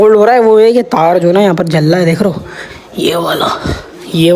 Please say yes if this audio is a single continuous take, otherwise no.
yes